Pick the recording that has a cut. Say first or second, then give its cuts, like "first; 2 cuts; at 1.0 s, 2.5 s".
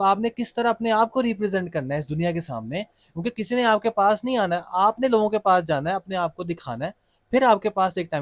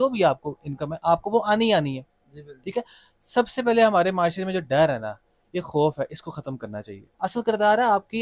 second; 1 cut; at 7.0 s